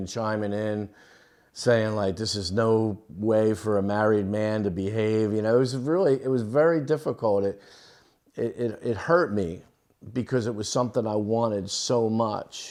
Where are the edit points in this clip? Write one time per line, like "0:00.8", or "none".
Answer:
none